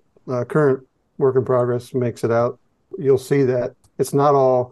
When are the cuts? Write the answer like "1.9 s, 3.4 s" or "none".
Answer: 3.8 s